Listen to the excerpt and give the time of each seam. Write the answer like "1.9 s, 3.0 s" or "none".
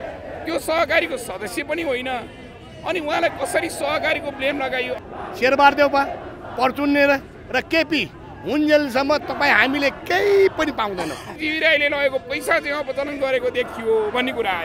4.9 s, 11.4 s